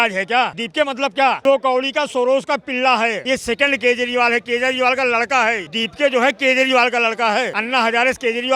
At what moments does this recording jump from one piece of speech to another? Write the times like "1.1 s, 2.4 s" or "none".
none